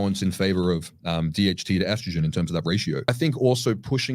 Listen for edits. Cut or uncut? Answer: cut